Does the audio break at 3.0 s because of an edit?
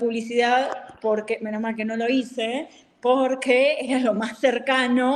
no; 0 cuts

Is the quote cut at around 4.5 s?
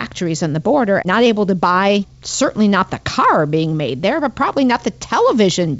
no; 2 cuts; at 1.0 s, 2.2 s

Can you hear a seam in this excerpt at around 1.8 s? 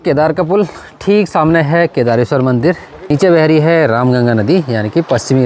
no; 1 cut; at 3.1 s

